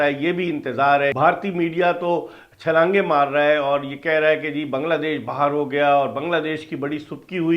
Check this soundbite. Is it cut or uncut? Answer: cut